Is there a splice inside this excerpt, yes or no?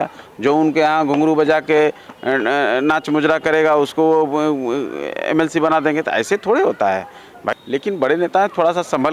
yes